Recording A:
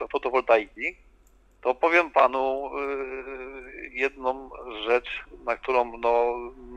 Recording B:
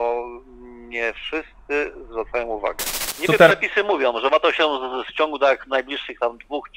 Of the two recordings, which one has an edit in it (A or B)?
B